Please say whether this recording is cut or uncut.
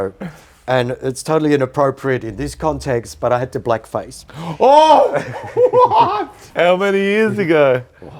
cut